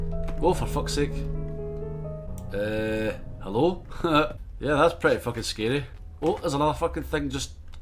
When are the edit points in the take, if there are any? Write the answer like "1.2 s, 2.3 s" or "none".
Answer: 2.3 s, 4.5 s, 6.0 s

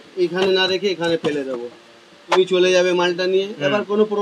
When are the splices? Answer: 2.4 s

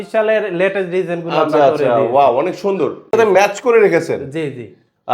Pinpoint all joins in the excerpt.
3.1 s

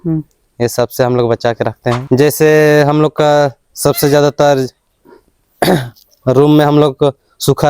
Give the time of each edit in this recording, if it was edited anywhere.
2.0 s

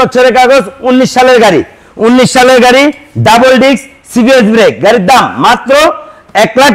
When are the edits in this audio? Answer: none

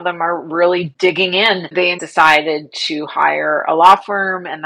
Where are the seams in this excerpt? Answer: 0.9 s, 2.0 s

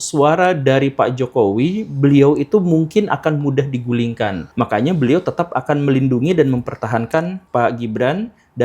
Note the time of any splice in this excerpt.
4.4 s, 7.4 s

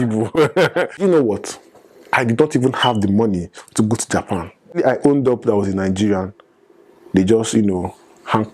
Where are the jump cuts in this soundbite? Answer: 0.9 s, 4.7 s

